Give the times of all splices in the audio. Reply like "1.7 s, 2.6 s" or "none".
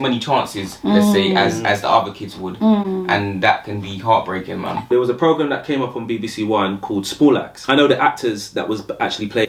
none